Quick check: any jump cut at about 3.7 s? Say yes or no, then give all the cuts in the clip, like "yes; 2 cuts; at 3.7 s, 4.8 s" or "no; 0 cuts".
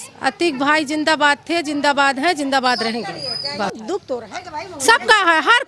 yes; 1 cut; at 3.7 s